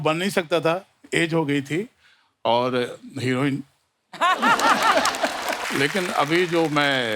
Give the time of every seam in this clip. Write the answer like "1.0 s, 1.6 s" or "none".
5.6 s